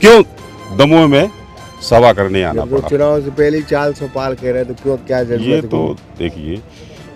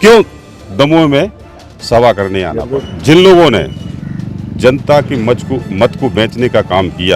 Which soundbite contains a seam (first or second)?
second